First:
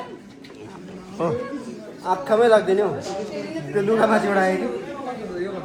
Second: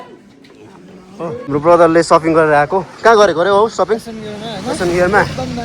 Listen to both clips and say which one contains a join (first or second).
second